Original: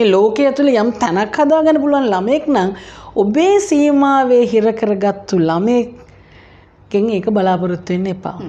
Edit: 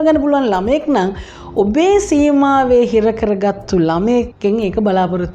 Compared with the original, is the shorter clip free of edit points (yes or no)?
no